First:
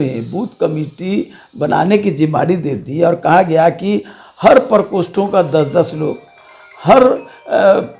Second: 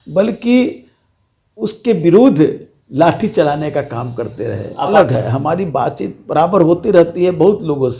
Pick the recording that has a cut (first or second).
second